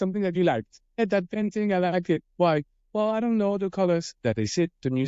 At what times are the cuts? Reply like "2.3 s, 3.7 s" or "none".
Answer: 1.0 s